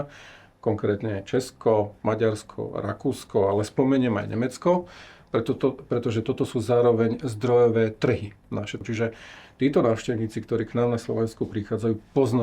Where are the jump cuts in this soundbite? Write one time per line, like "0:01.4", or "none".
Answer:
0:08.8